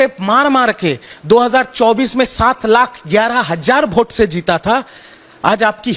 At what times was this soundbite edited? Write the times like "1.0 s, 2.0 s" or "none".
none